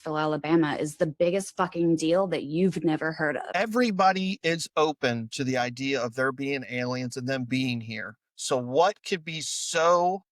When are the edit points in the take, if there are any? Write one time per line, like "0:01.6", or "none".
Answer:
0:03.4